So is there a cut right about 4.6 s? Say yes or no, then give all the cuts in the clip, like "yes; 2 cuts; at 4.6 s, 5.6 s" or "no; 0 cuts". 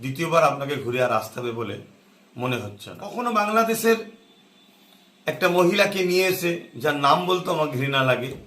no; 1 cut; at 3.0 s